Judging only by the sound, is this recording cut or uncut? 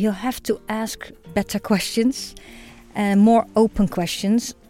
uncut